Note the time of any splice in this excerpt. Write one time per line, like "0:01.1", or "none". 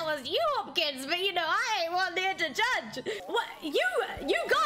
0:03.2